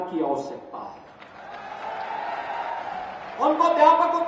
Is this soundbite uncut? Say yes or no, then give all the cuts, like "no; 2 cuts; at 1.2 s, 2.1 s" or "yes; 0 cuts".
yes; 0 cuts